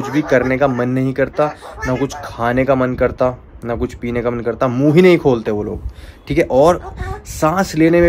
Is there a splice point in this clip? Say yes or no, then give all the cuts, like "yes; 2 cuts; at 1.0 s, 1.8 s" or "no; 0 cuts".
no; 0 cuts